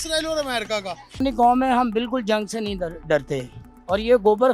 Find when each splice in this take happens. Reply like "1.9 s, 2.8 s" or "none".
1.2 s